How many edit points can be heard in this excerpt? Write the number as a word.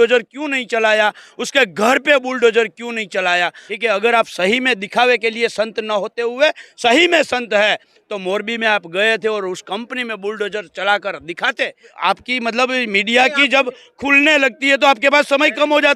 two